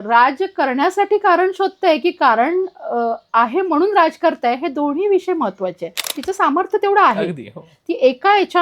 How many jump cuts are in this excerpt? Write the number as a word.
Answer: one